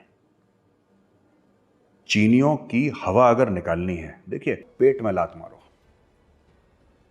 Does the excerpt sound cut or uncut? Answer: cut